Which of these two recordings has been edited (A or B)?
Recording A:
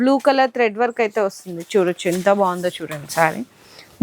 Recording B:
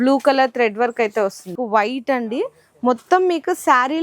B